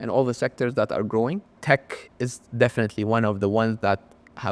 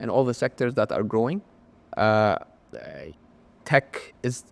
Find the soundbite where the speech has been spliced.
first; 1 cut; at 1.5 s

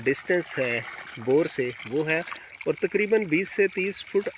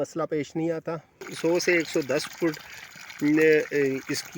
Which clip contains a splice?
second; 1 cut; at 1.3 s

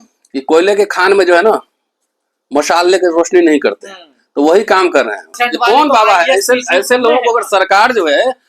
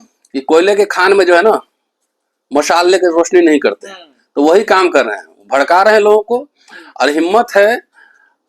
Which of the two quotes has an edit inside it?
first; 1 cut; at 5.3 s

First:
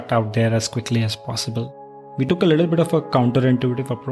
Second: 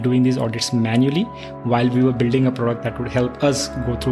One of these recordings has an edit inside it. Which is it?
first; 1 cut; at 2.2 s

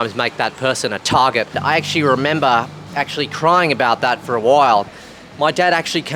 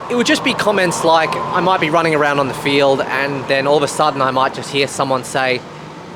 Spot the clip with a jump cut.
first; 2 cuts; at 1.5 s, 5.0 s

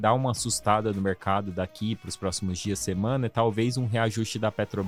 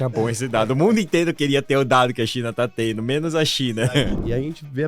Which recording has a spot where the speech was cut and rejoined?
second; 1 cut; at 3.8 s

